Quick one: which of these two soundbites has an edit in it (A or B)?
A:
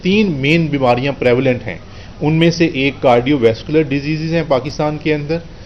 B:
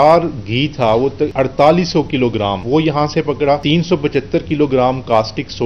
B